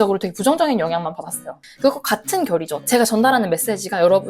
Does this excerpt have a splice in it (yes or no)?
yes